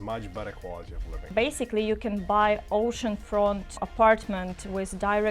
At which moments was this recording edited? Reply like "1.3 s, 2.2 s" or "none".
1.2 s, 3.8 s